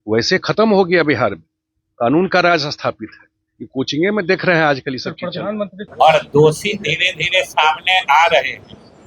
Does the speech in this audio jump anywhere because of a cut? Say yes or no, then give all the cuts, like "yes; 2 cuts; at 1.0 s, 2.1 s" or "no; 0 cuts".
yes; 1 cut; at 5.8 s